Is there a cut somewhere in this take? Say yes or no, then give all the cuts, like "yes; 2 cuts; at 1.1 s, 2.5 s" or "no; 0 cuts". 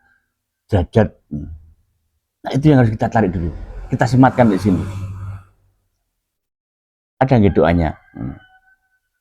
no; 0 cuts